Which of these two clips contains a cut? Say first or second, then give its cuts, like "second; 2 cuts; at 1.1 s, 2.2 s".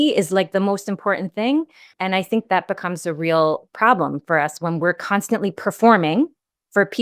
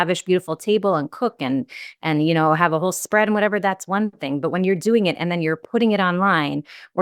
first; 1 cut; at 1.9 s